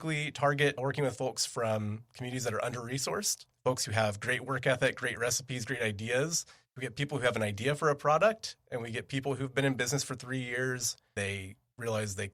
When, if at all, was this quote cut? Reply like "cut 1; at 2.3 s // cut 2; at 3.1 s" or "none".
cut 1; at 3.4 s // cut 2; at 6.8 s // cut 3; at 11.1 s